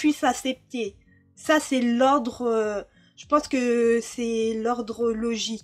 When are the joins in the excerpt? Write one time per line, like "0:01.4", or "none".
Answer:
none